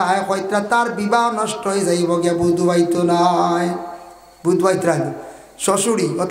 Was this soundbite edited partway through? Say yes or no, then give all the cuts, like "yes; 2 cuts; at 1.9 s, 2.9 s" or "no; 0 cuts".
no; 0 cuts